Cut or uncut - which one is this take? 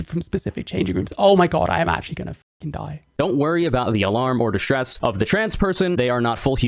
cut